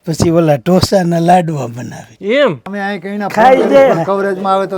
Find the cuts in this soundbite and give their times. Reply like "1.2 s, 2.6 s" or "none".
2.6 s